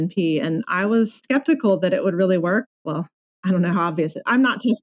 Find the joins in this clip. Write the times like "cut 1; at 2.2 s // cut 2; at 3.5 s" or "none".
cut 1; at 1.2 s // cut 2; at 2.7 s

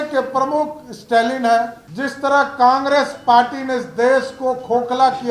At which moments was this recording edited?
cut 1; at 1.8 s

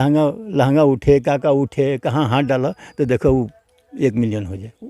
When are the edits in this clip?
none

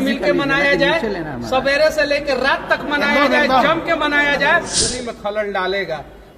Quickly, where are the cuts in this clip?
cut 1; at 4.9 s

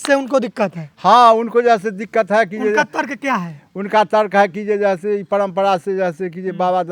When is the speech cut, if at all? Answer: none

